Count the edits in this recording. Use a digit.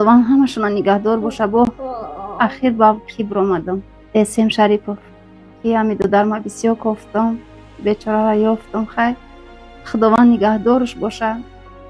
1